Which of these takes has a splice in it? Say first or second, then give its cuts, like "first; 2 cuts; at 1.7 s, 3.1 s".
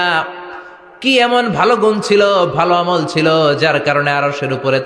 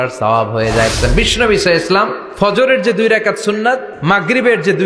second; 3 cuts; at 0.9 s, 2.2 s, 3.9 s